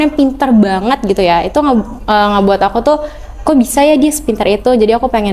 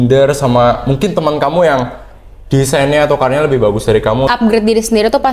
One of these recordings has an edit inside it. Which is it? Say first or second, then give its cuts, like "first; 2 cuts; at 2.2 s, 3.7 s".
second; 1 cut; at 4.3 s